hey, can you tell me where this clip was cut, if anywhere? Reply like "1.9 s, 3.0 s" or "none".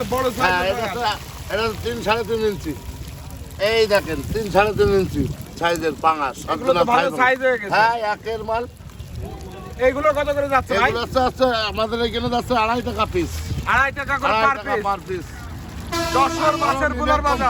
none